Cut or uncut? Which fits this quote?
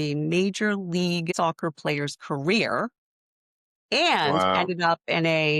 cut